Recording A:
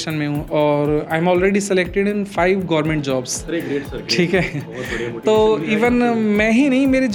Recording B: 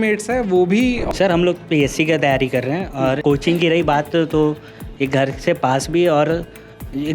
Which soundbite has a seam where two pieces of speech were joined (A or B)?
B